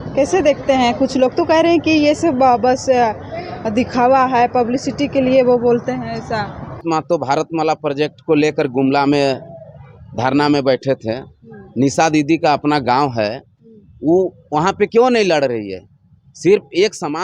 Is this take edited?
yes; 1 cut; at 6.8 s

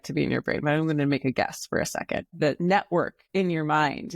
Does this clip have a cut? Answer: yes; 2 cuts; at 2.3 s, 3.2 s

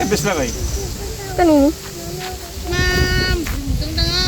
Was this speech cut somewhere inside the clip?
no; 0 cuts

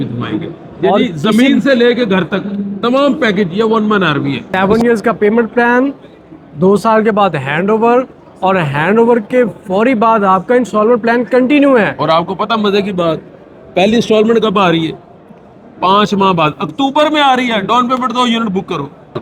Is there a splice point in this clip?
yes; 1 cut; at 4.5 s

